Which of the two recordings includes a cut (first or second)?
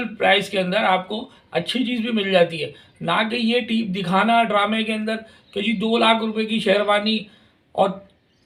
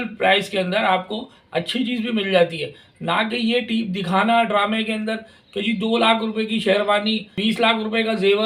second